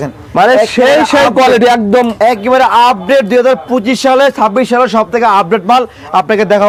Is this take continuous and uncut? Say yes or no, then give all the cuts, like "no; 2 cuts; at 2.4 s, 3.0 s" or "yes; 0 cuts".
yes; 0 cuts